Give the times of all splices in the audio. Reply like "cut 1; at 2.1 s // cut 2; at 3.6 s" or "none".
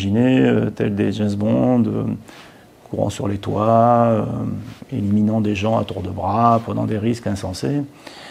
none

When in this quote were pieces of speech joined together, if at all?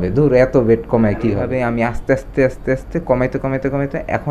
cut 1; at 1.5 s

